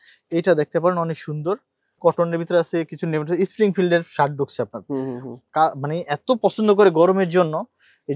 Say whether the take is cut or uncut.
cut